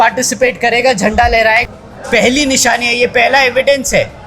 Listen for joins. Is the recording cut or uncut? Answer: cut